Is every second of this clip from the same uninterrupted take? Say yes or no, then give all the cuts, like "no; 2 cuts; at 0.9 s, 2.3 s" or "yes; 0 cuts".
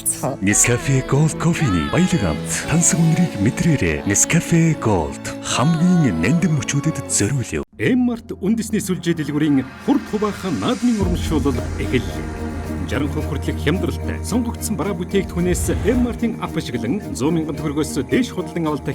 no; 1 cut; at 7.7 s